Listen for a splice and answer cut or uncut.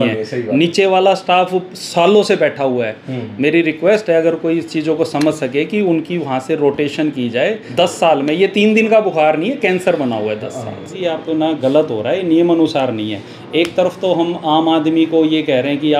cut